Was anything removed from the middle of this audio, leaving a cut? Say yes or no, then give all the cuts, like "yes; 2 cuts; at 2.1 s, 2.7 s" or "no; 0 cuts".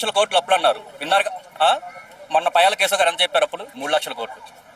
no; 0 cuts